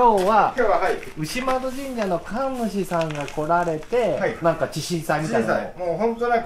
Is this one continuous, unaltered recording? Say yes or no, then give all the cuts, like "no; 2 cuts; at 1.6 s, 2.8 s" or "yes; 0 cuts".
no; 1 cut; at 4.4 s